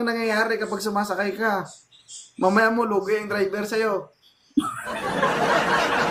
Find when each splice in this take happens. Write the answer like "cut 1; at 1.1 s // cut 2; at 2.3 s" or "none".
none